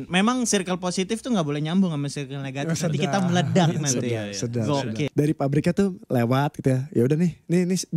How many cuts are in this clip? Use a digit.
1